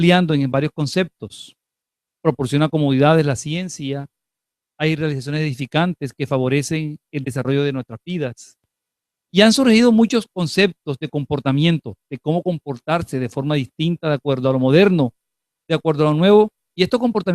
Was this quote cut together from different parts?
yes; 1 cut; at 7.5 s

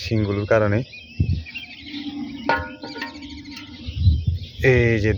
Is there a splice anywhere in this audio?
no; 0 cuts

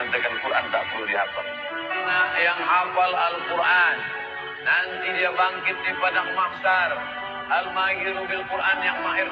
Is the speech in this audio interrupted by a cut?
no; 0 cuts

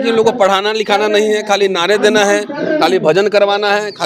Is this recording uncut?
yes; 0 cuts

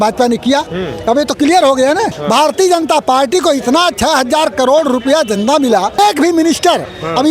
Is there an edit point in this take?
yes; 2 cuts; at 2.2 s, 6.0 s

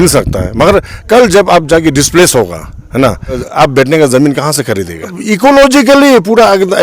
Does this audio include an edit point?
yes; 2 cuts; at 3.5 s, 5.2 s

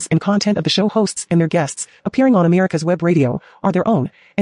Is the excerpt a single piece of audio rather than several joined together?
yes; 0 cuts

